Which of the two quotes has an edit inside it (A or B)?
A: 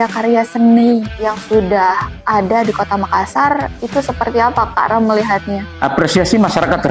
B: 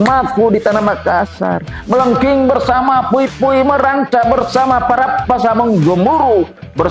A